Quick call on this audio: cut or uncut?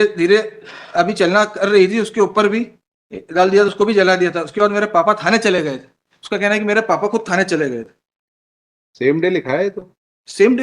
uncut